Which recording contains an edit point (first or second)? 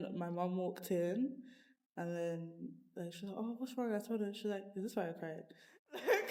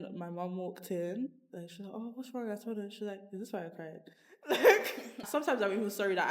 second